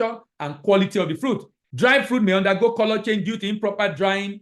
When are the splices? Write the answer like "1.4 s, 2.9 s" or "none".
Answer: 1.6 s